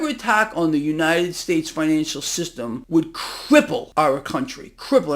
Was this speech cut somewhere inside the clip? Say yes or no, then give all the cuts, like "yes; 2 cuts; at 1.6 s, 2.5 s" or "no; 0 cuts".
yes; 2 cuts; at 2.8 s, 3.9 s